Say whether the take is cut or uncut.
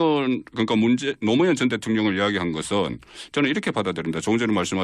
uncut